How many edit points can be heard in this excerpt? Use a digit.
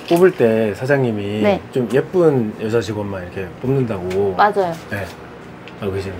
0